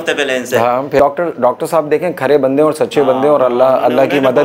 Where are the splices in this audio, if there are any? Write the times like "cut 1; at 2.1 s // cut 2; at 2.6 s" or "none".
cut 1; at 1.0 s